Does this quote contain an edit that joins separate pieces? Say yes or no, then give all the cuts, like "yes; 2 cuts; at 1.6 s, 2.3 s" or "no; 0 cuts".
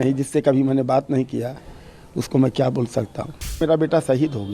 yes; 1 cut; at 3.6 s